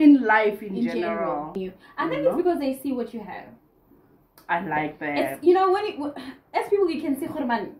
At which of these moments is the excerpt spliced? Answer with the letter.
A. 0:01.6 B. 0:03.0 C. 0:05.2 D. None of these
A